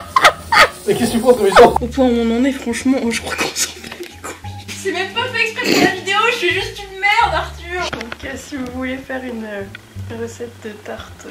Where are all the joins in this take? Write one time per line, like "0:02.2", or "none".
0:01.7
0:04.7
0:07.9